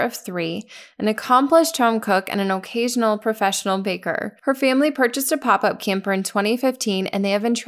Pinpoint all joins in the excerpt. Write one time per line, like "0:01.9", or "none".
0:04.3